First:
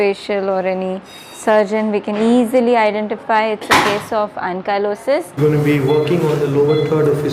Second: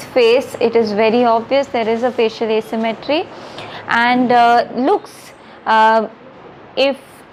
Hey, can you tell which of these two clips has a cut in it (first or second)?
first